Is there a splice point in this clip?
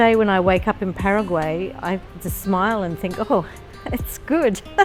no; 0 cuts

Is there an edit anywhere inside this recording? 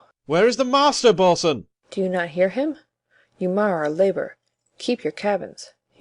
yes; 1 cut; at 5.1 s

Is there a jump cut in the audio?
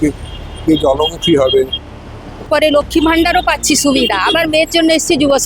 yes; 1 cut; at 2.4 s

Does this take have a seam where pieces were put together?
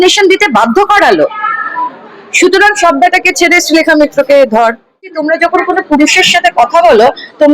yes; 1 cut; at 5.2 s

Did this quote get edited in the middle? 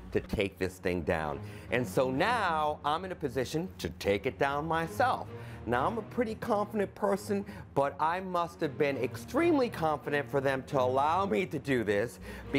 yes; 1 cut; at 5.4 s

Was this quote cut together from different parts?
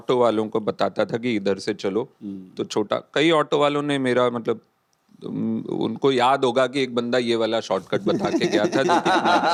no; 0 cuts

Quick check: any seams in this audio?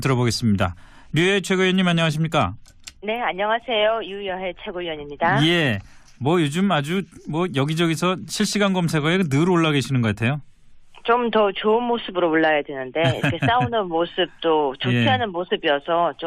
no; 0 cuts

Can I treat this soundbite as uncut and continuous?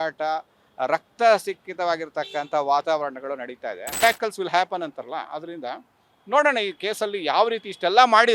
no; 1 cut; at 4.0 s

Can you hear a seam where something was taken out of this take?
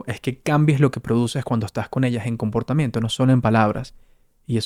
no; 0 cuts

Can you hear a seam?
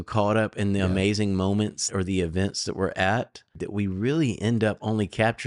yes; 2 cuts; at 1.9 s, 3.6 s

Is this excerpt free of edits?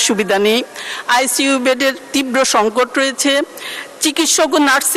yes; 0 cuts

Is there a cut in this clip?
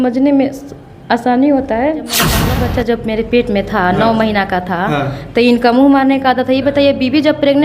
yes; 1 cut; at 2.3 s

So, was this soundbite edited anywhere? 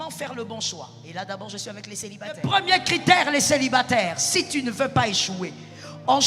yes; 1 cut; at 2.4 s

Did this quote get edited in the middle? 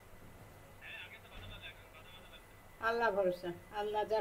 no; 0 cuts

